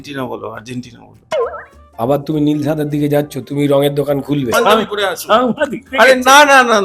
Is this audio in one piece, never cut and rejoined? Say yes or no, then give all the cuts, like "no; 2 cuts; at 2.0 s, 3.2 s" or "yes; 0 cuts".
no; 1 cut; at 4.5 s